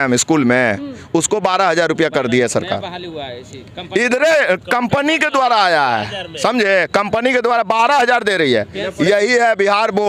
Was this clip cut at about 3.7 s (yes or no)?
no